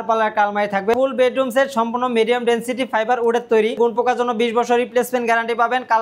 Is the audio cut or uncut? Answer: cut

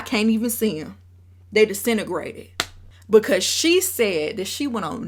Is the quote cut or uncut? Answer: uncut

